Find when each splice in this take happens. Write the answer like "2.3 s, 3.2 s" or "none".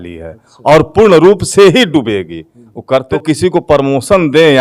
3.1 s